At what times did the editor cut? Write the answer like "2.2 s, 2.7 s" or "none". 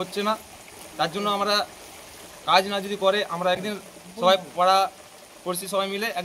3.6 s